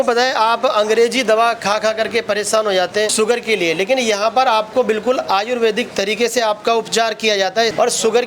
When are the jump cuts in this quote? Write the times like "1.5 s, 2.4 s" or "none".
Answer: none

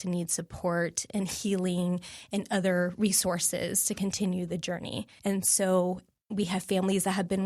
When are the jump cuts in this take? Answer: 5.0 s

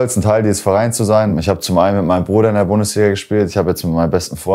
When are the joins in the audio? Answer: 1.3 s

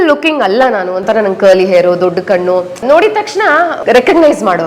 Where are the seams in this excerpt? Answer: 2.8 s, 3.8 s

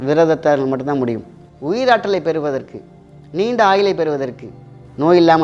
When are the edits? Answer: 1.5 s

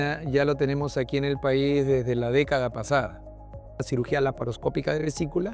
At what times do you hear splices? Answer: 3.8 s

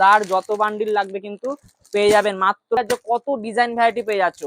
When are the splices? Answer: 2.8 s

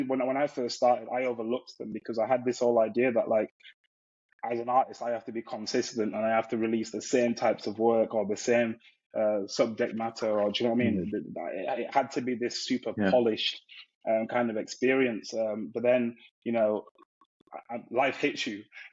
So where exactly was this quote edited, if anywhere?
none

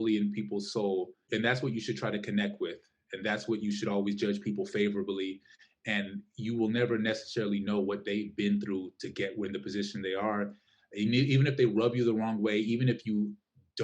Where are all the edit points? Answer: 1.2 s

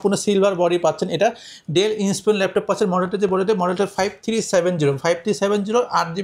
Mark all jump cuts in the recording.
none

